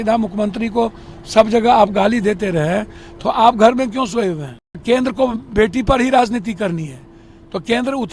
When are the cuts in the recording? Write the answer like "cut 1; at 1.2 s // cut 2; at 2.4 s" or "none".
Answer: cut 1; at 4.8 s